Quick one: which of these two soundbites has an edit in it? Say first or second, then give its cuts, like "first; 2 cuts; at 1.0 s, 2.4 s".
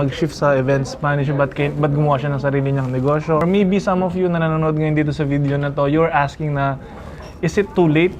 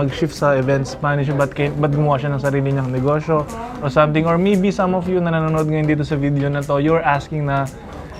first; 1 cut; at 3.4 s